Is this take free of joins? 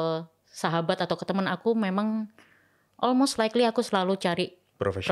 yes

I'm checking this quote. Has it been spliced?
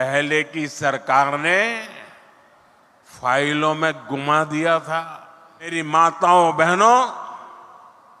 yes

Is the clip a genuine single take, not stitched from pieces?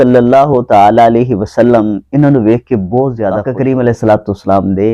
no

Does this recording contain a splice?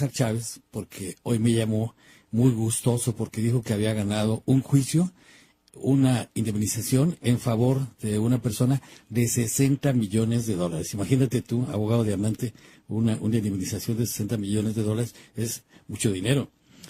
yes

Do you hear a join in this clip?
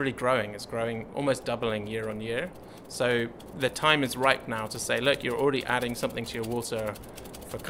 no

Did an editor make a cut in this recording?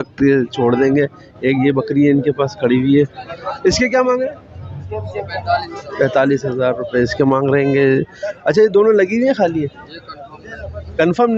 no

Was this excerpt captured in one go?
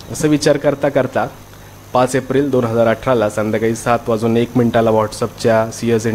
yes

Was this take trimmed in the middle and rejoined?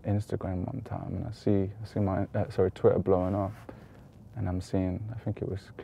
no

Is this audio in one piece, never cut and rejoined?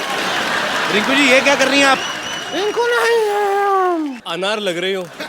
no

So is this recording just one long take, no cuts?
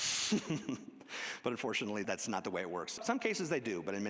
no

